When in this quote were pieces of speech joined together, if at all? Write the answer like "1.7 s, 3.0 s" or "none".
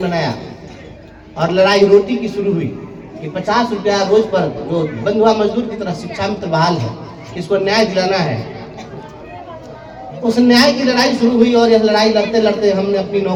none